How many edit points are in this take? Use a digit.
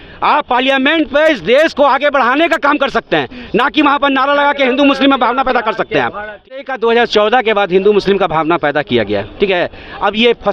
1